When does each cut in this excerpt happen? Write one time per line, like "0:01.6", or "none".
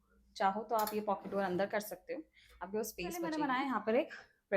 0:03.3